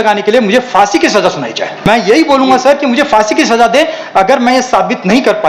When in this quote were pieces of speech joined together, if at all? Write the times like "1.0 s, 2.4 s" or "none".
1.9 s